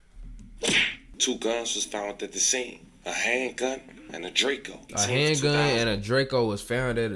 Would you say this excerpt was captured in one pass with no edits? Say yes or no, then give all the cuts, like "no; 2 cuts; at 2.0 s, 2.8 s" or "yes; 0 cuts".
no; 2 cuts; at 1.0 s, 4.9 s